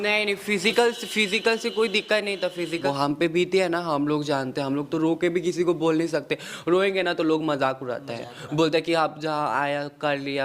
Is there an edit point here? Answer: yes; 1 cut; at 2.7 s

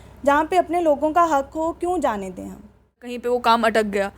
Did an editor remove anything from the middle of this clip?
yes; 1 cut; at 3.2 s

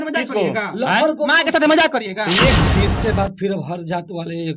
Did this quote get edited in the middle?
yes; 1 cut; at 2.6 s

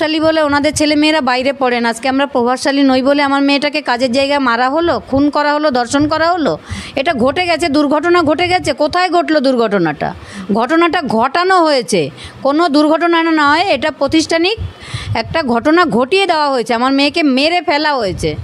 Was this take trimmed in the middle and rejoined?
no; 0 cuts

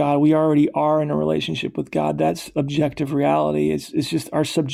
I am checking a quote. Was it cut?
no; 0 cuts

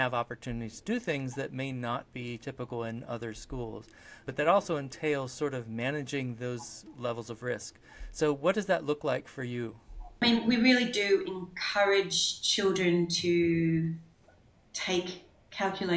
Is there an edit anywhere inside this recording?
yes; 2 cuts; at 4.3 s, 10.2 s

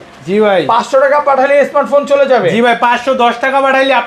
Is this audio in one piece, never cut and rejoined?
yes; 0 cuts

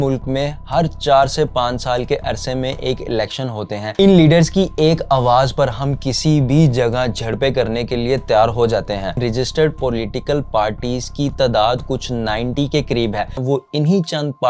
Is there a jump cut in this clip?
yes; 3 cuts; at 3.9 s, 9.2 s, 13.4 s

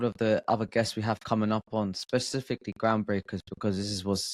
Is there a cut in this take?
no; 0 cuts

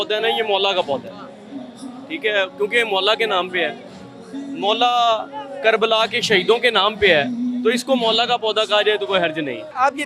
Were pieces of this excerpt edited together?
no; 0 cuts

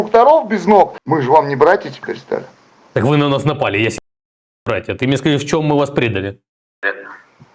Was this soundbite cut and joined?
yes; 1 cut; at 1.0 s

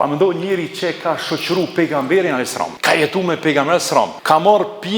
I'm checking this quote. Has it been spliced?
yes; 2 cuts; at 2.8 s, 4.2 s

